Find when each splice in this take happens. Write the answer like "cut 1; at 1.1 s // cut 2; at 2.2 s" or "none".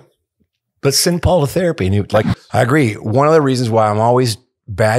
cut 1; at 2.3 s